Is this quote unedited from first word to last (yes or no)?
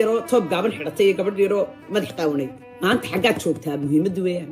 no